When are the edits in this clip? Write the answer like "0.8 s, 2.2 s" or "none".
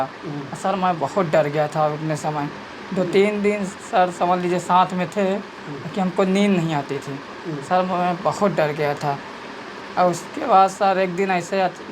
none